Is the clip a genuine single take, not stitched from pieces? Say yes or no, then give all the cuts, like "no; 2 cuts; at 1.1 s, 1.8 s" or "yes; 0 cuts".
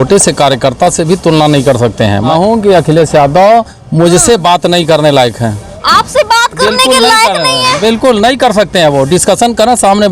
no; 1 cut; at 2.3 s